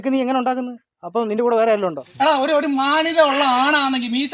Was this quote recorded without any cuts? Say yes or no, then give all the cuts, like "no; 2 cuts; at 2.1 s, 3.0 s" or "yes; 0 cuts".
no; 1 cut; at 2.0 s